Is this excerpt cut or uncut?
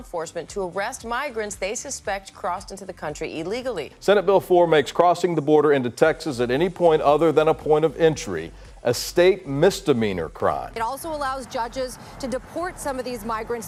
uncut